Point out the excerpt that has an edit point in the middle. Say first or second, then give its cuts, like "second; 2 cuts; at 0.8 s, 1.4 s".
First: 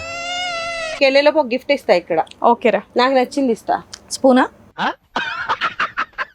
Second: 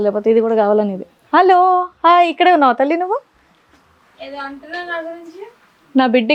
first; 1 cut; at 1.0 s